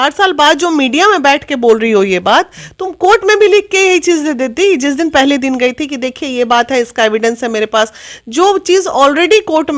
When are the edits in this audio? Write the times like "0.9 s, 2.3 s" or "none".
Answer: none